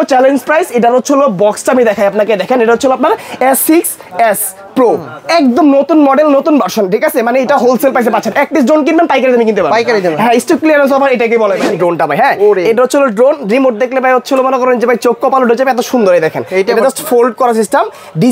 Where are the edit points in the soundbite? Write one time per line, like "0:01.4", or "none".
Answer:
0:11.7